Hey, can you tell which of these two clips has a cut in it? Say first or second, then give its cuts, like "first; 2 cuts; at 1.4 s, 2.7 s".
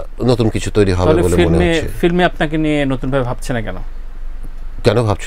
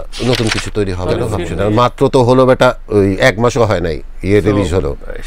second; 1 cut; at 1.4 s